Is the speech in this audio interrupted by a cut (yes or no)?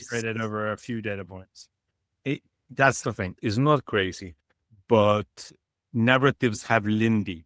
yes